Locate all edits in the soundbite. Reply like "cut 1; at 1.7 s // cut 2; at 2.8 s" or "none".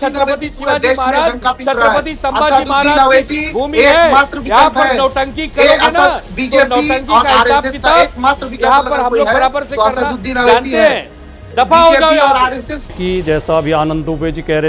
cut 1; at 12.9 s